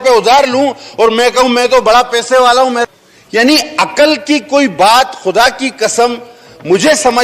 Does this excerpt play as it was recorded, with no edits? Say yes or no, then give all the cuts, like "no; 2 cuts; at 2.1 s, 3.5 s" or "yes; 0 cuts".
no; 1 cut; at 2.9 s